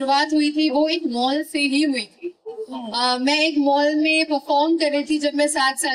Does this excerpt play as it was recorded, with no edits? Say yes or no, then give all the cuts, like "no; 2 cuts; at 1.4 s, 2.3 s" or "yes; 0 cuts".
yes; 0 cuts